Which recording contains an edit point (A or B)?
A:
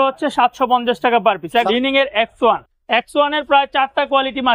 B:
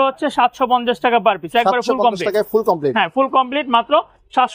A